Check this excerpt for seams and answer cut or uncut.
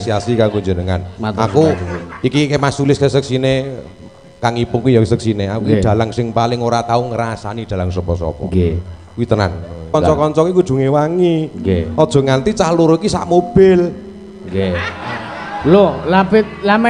cut